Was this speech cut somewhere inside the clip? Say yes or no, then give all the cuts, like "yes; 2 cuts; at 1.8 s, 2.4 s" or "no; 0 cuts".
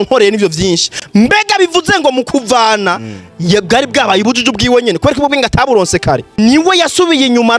yes; 1 cut; at 6.3 s